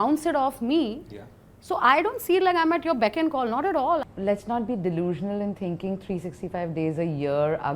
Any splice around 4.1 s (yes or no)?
yes